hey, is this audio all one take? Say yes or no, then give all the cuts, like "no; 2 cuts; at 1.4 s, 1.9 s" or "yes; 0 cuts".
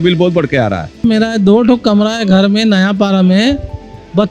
no; 1 cut; at 1.0 s